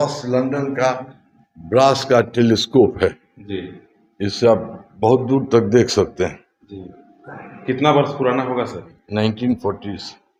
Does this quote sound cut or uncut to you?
uncut